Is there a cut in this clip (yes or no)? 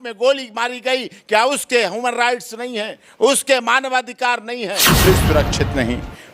yes